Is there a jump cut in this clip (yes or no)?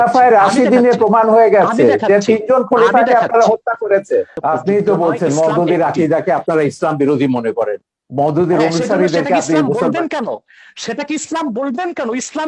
yes